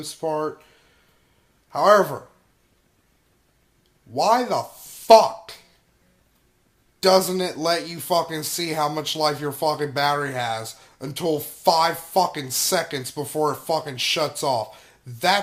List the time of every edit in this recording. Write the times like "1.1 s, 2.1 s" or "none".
8.0 s